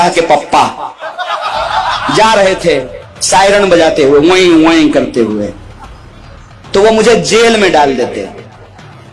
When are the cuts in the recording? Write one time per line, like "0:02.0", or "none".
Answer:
none